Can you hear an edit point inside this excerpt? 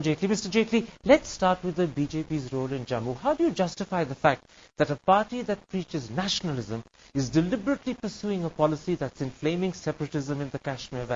yes; 1 cut; at 8.1 s

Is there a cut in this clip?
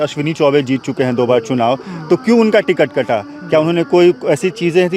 no; 0 cuts

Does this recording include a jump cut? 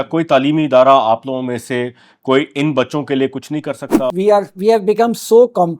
yes; 1 cut; at 4.1 s

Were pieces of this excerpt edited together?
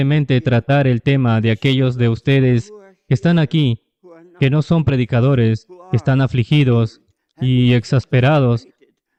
no; 0 cuts

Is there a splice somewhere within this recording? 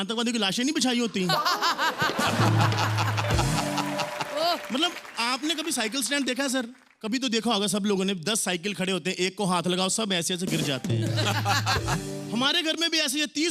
no; 0 cuts

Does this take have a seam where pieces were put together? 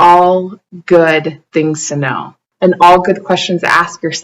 yes; 1 cut; at 2.4 s

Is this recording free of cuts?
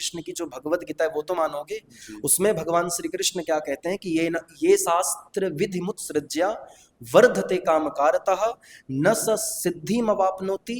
yes; 0 cuts

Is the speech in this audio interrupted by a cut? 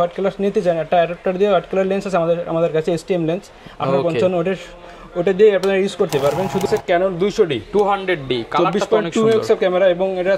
yes; 1 cut; at 6.6 s

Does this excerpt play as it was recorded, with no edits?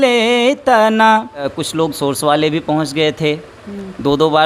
no; 1 cut; at 1.6 s

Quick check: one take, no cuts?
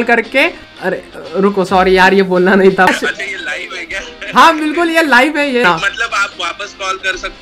no; 3 cuts; at 1.0 s, 2.9 s, 5.6 s

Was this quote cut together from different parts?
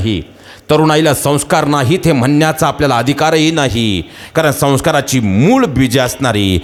no; 0 cuts

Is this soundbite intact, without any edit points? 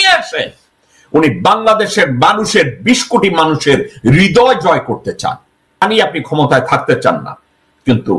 no; 1 cut; at 5.8 s

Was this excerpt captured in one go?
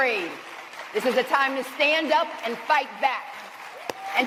yes; 0 cuts

